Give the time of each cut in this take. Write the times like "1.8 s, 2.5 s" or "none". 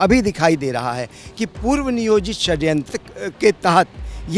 2.9 s